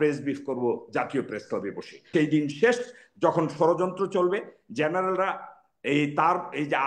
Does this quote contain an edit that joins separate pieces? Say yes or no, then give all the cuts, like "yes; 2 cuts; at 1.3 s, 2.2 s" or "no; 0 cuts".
yes; 1 cut; at 2.1 s